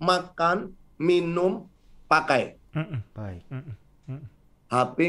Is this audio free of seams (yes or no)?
yes